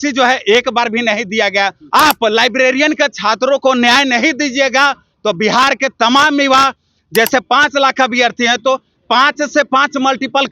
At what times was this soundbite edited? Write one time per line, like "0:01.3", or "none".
0:01.8